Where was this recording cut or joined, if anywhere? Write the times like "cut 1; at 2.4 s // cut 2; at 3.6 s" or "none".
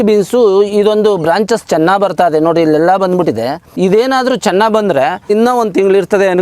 cut 1; at 3.6 s // cut 2; at 5.3 s